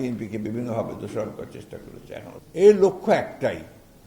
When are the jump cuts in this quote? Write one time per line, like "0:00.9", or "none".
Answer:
0:02.3